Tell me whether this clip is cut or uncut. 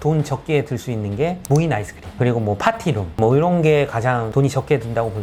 uncut